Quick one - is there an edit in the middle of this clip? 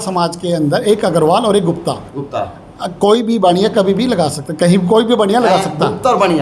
no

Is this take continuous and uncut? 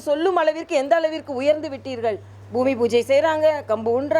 no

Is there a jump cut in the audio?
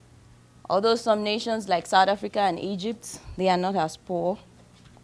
no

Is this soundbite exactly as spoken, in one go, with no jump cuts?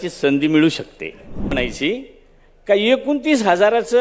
no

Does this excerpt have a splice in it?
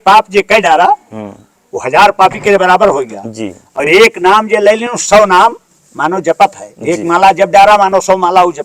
no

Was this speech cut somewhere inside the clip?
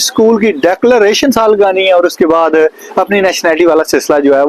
no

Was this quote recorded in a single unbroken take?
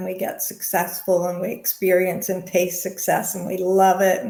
yes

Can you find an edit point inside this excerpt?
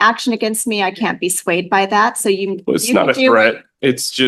no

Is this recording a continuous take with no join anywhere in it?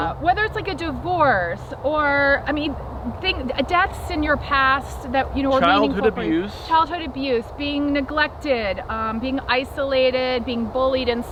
yes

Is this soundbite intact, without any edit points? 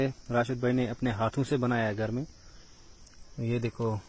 yes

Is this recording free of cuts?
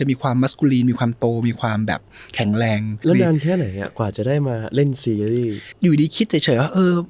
no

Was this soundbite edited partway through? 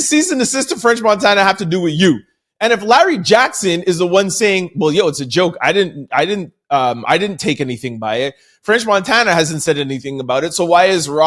no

